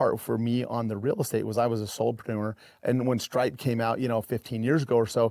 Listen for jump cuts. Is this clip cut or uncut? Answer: cut